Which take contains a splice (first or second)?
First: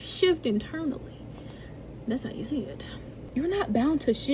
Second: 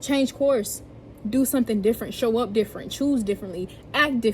first